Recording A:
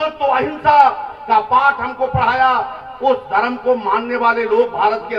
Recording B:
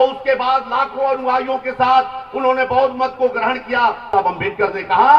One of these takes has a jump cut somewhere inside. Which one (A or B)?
B